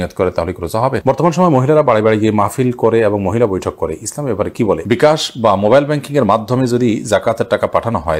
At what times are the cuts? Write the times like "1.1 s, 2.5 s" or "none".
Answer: 1.0 s, 4.8 s